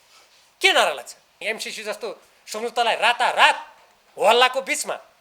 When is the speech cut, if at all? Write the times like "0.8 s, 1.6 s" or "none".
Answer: 1.4 s